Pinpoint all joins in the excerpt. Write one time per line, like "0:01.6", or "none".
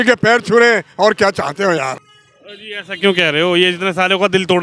0:02.0